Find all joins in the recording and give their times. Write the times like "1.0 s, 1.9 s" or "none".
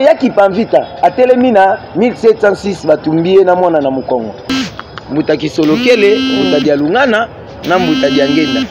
4.5 s

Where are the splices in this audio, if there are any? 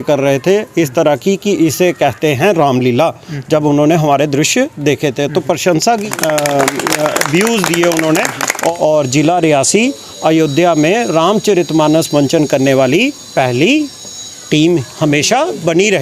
6.0 s, 8.7 s

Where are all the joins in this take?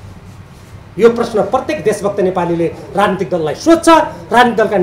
none

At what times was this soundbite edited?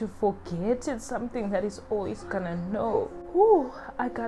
3.2 s

